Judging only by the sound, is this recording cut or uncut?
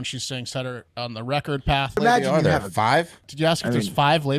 cut